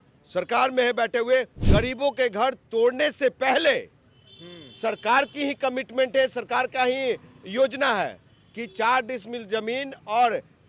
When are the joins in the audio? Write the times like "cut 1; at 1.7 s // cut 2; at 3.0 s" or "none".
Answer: cut 1; at 1.6 s